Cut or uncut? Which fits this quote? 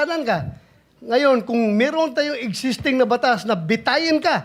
uncut